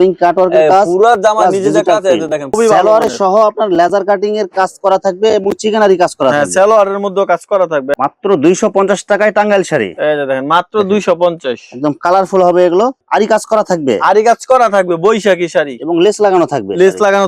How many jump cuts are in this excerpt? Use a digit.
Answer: 3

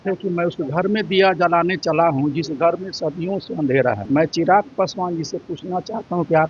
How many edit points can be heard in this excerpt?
1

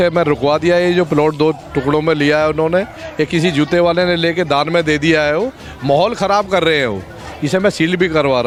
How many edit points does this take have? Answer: 0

